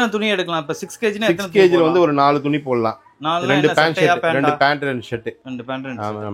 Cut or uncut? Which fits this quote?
uncut